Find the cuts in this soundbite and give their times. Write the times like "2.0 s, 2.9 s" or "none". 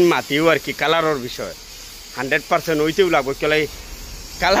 none